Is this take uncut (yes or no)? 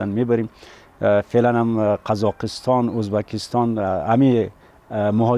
yes